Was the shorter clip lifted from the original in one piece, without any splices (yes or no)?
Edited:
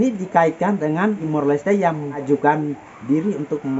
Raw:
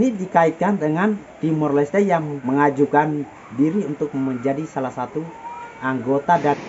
no